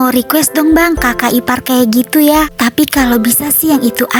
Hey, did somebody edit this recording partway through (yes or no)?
no